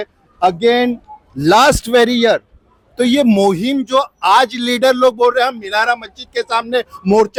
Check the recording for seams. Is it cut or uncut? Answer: uncut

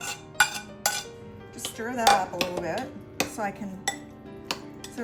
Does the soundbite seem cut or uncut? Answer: uncut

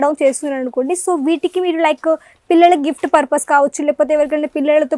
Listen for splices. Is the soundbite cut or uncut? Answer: uncut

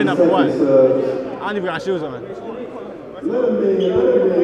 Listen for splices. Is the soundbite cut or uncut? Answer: uncut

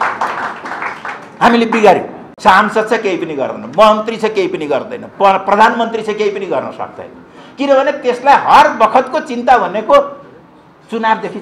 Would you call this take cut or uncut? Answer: cut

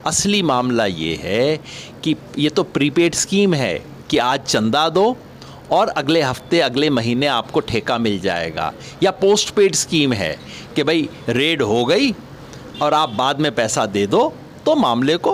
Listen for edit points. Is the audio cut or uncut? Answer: uncut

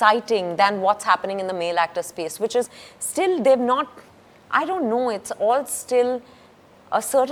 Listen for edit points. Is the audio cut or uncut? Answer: uncut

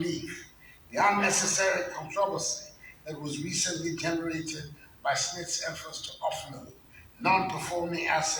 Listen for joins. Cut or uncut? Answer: uncut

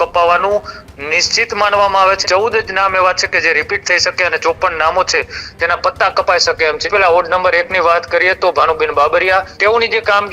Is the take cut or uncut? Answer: cut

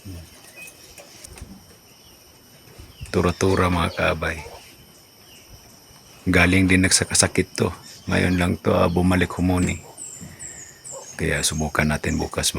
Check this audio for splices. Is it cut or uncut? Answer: cut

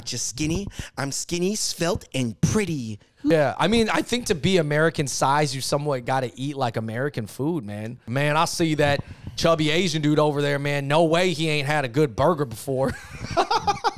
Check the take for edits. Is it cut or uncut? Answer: cut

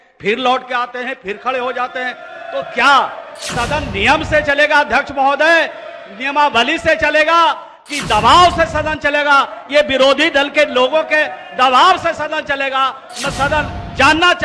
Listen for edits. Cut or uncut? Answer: uncut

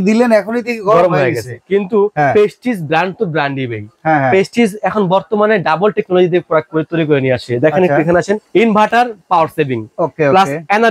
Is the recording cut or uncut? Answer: uncut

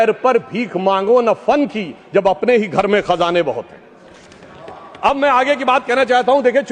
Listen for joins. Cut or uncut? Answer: uncut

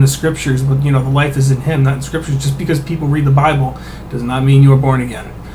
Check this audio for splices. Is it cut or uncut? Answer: uncut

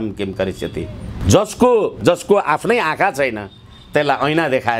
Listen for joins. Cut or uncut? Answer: cut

